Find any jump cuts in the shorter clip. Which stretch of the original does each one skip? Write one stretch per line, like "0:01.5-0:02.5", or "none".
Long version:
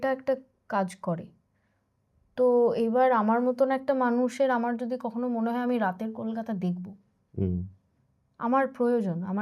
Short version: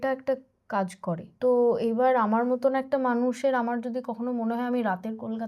0:01.3-0:02.2